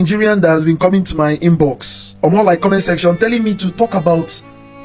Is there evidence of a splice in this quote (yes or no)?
no